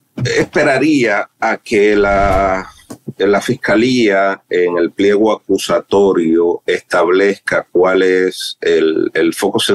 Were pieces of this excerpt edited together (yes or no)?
no